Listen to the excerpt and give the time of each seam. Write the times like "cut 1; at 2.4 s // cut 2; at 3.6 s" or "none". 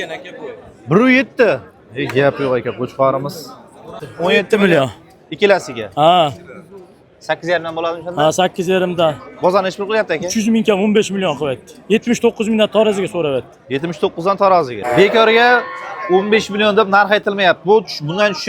cut 1; at 4.0 s // cut 2; at 14.8 s

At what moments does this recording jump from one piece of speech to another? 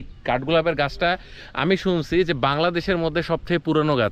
none

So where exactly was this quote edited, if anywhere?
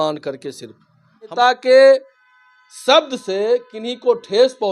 cut 1; at 1.3 s

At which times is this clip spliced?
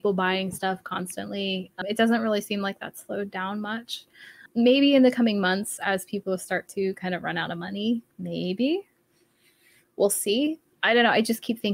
cut 1; at 1.8 s // cut 2; at 4.4 s // cut 3; at 10.6 s

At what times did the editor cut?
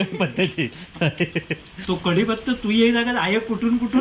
cut 1; at 1.7 s

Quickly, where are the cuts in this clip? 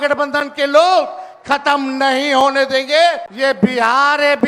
cut 1; at 3.3 s

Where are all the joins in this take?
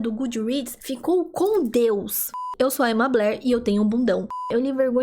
cut 1; at 2.4 s // cut 2; at 4.3 s

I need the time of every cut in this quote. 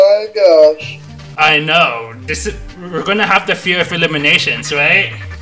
none

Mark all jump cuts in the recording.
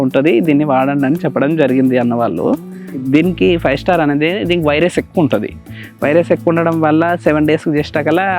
cut 1; at 2.9 s

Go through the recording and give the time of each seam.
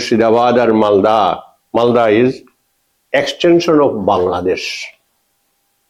none

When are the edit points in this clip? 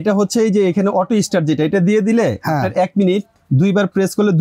cut 1; at 3.4 s

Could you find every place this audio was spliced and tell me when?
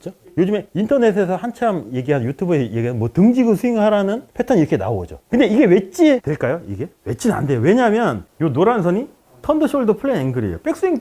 cut 1; at 8.2 s

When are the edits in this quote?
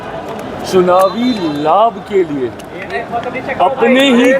none

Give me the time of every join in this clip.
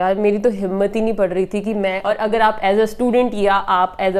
cut 1; at 2.0 s

